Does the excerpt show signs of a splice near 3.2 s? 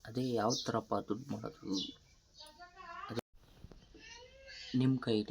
yes; 1 cut; at 3.2 s

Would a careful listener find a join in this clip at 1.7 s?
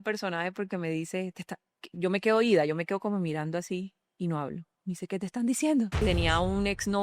no; 1 cut; at 6.0 s

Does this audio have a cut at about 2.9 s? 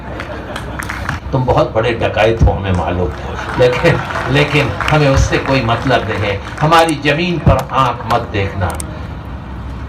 no; 1 cut; at 1.2 s

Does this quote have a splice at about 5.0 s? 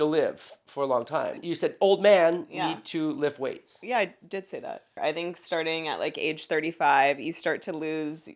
yes; 2 cuts; at 1.4 s, 5.0 s

